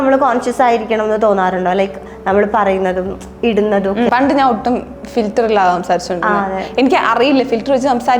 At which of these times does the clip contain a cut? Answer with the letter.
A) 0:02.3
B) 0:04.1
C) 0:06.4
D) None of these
B